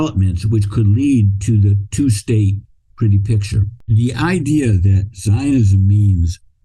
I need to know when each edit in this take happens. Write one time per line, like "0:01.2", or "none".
0:03.7